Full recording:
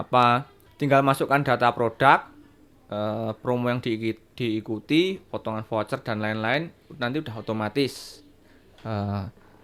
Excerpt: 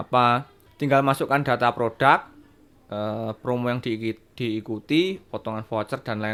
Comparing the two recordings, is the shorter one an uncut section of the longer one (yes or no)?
yes